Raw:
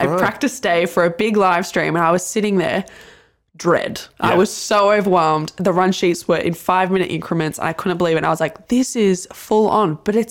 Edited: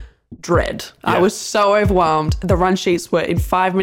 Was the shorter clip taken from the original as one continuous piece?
yes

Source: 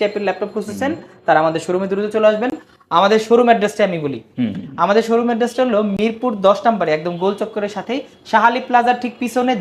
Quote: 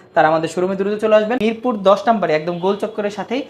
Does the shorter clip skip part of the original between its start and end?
yes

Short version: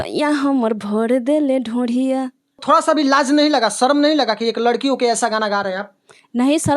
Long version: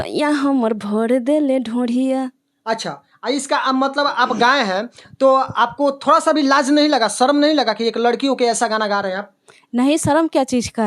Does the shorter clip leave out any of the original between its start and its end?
yes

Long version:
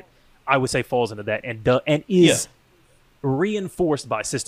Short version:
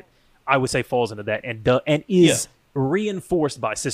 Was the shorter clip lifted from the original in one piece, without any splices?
no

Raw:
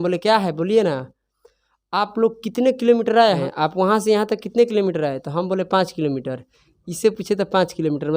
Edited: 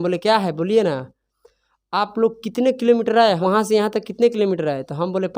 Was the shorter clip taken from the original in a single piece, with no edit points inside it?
no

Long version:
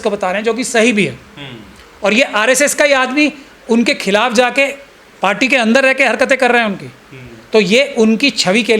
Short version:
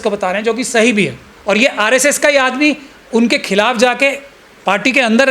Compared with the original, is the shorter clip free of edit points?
no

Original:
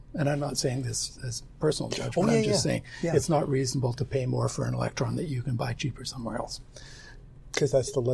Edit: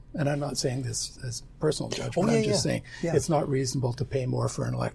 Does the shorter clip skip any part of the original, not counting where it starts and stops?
no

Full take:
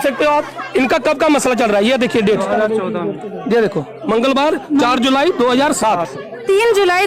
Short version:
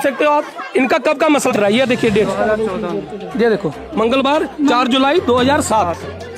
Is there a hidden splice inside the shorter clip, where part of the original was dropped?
yes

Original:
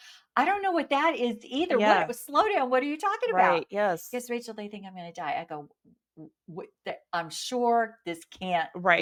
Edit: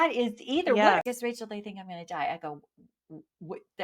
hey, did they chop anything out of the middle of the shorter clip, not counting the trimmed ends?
yes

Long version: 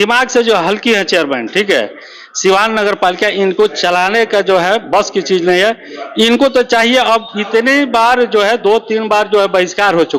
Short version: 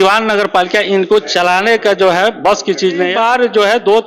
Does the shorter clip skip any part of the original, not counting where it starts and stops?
yes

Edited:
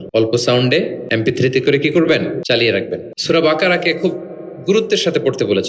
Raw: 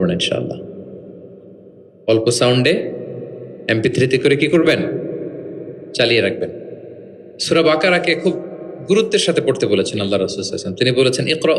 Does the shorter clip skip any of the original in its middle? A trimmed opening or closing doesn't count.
yes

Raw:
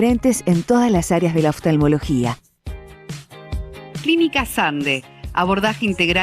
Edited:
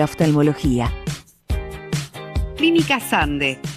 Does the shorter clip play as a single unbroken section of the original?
yes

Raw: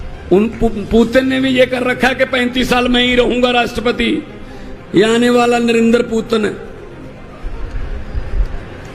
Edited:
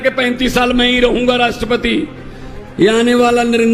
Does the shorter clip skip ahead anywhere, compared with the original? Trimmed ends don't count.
no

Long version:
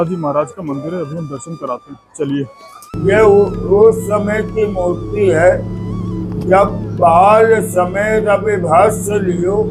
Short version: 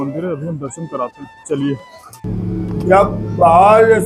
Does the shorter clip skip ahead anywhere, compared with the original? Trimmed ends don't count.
yes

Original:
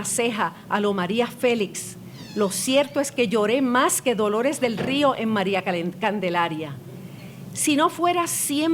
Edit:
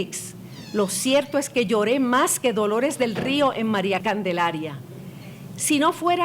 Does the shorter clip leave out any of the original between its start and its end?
yes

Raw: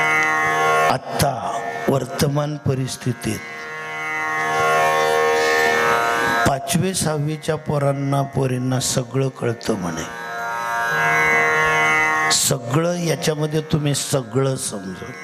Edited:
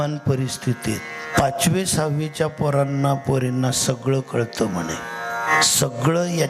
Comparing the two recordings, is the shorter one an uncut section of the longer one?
no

